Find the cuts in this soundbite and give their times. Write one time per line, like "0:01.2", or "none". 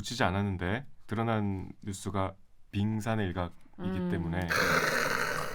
none